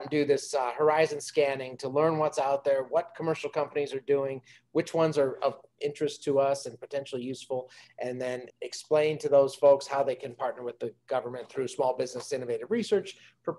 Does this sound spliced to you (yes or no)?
yes